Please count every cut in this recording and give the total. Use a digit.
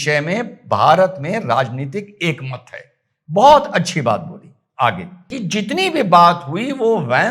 1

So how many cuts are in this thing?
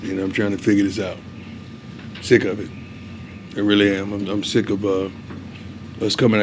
0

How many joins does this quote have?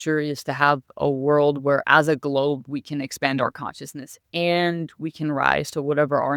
1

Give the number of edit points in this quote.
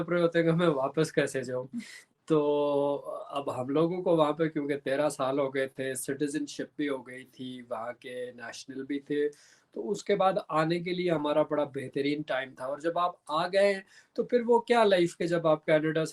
0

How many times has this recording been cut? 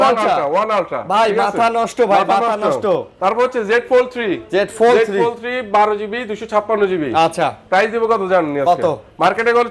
0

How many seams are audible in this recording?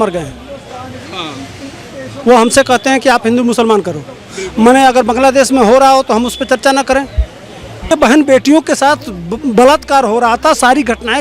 1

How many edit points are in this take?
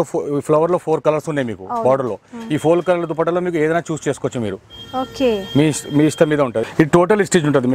1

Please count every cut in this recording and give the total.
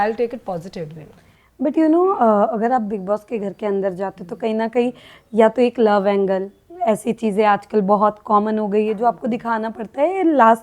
0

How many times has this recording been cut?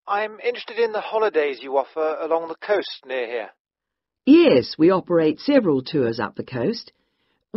1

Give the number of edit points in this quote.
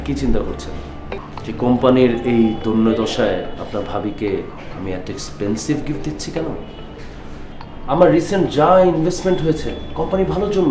1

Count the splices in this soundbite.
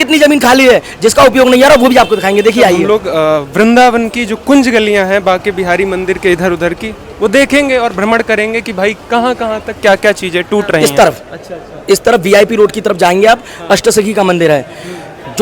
2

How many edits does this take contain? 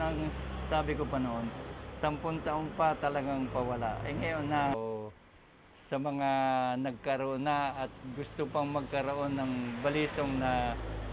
1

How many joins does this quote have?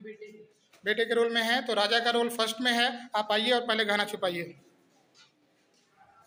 0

